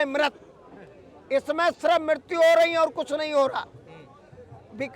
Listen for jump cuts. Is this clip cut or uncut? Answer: uncut